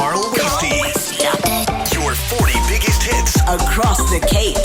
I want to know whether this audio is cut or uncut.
uncut